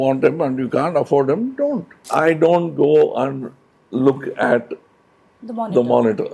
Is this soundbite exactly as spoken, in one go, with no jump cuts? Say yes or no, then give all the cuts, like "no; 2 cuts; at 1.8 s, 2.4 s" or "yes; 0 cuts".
no; 1 cut; at 2.0 s